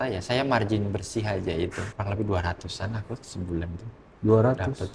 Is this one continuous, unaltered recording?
no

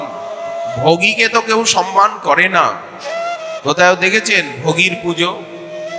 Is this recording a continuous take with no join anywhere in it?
yes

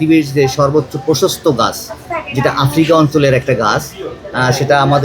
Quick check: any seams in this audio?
no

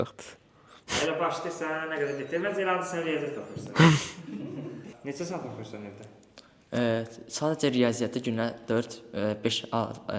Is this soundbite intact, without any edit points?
no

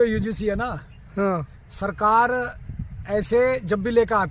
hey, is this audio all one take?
yes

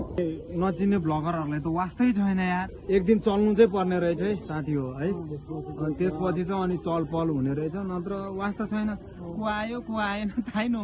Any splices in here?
yes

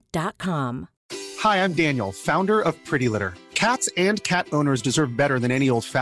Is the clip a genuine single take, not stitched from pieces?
no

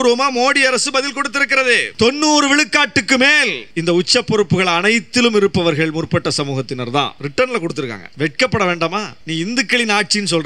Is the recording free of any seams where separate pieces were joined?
no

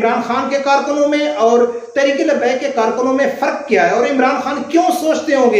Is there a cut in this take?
no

